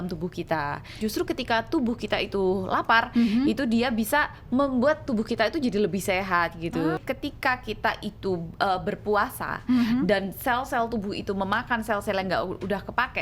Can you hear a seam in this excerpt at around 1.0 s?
yes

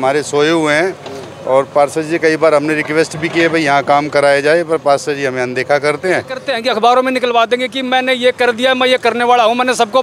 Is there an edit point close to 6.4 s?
yes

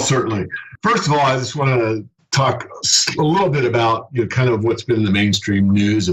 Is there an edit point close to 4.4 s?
no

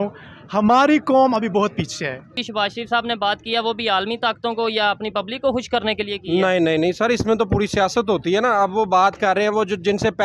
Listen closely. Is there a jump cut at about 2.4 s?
yes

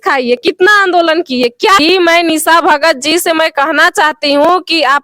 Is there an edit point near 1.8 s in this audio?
yes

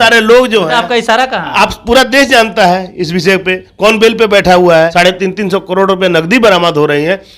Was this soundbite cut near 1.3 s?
no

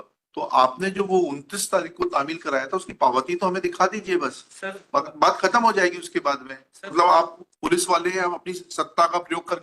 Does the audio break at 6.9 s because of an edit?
yes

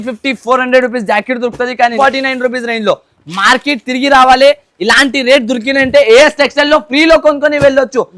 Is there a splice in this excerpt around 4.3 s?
no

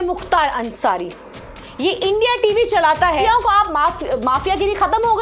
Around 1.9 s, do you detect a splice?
no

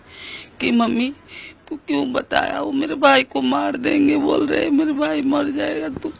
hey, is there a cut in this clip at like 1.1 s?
no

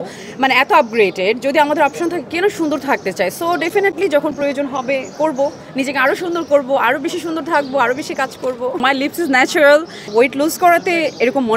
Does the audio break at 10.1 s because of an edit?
yes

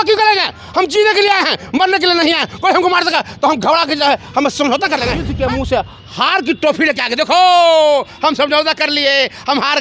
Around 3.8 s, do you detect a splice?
no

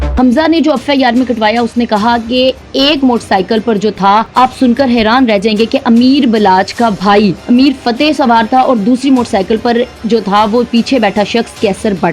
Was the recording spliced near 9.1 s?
no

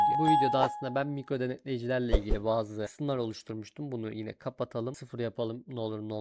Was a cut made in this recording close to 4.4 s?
no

